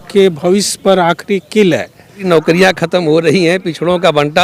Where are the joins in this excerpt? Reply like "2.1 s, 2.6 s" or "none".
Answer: 2.2 s

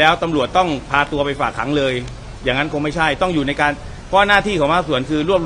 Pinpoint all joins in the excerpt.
none

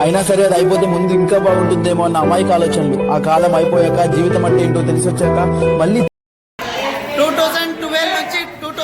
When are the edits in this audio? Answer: 6.1 s

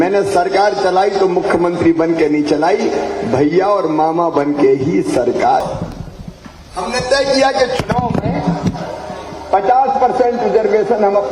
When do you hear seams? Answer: 5.6 s

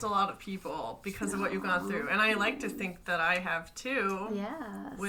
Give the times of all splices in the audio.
none

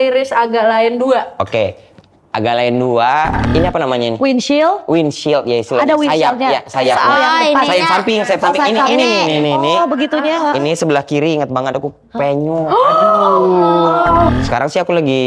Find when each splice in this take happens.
3.4 s, 14.3 s

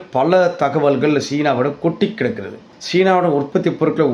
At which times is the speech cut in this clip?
none

